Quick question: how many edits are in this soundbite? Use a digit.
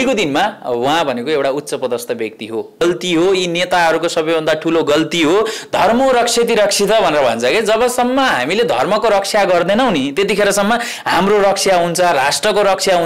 1